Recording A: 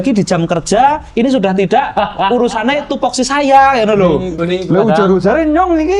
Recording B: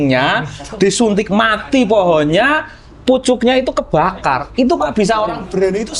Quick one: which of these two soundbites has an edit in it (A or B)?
A